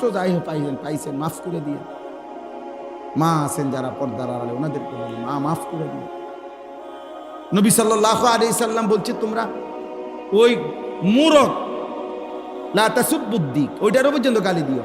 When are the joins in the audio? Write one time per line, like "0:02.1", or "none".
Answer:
0:01.8
0:03.1